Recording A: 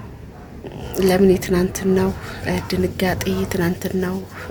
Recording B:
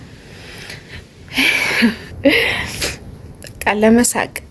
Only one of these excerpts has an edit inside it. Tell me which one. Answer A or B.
B